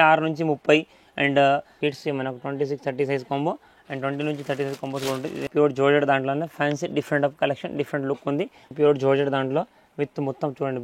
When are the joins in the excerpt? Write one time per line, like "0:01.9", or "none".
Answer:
0:01.7
0:05.5
0:08.7